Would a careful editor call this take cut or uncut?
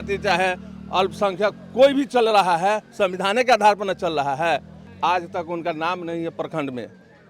cut